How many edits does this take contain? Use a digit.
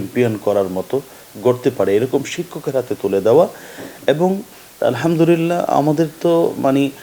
1